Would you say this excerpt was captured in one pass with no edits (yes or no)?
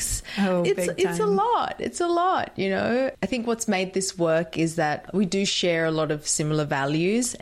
yes